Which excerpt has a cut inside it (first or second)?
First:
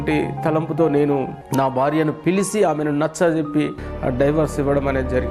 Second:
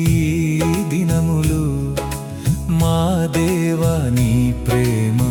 first